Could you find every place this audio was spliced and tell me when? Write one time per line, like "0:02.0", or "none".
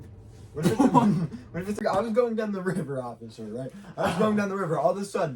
0:01.8